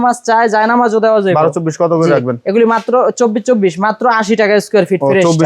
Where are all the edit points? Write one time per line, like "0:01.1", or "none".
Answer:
none

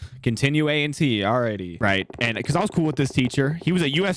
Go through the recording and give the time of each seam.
0:01.7

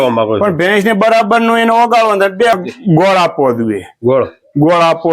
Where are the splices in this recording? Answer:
0:02.6

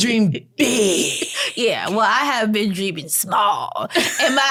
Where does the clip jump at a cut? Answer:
none

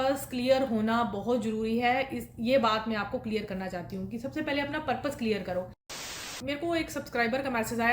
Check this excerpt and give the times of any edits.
0:06.1

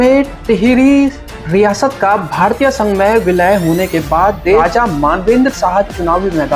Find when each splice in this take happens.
0:04.6

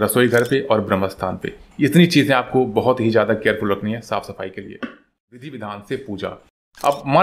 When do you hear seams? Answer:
0:05.4

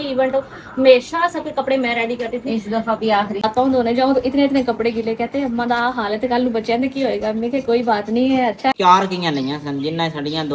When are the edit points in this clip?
0:03.4
0:08.7

